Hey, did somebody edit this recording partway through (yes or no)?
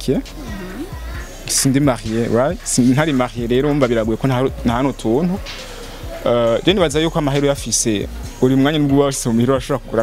no